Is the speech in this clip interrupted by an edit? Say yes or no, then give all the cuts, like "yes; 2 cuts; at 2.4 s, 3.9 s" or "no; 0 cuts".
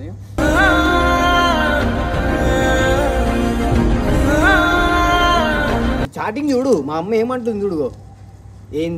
yes; 1 cut; at 6.1 s